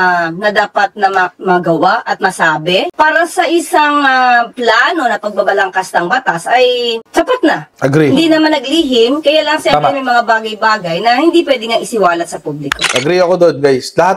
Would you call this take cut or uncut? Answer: cut